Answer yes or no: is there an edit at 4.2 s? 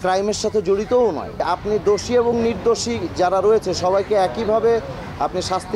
no